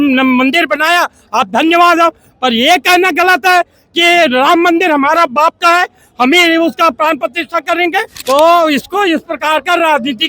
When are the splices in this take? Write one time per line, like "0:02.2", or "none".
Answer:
0:08.1